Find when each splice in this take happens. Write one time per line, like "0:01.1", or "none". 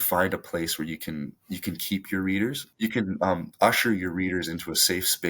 0:02.6